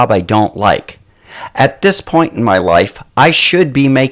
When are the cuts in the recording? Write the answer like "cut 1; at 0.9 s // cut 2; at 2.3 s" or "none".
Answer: cut 1; at 1.2 s